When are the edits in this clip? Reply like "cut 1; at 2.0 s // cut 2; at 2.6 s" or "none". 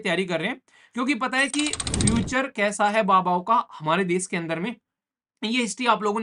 none